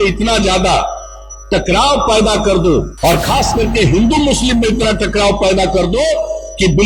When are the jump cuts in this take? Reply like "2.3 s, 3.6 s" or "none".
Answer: 2.9 s